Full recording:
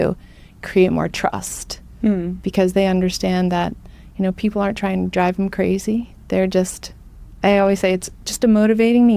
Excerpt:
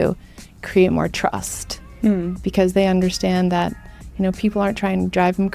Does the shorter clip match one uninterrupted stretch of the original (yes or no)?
yes